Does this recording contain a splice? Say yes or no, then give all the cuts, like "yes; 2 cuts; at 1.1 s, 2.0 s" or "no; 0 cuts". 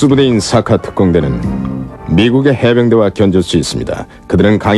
no; 0 cuts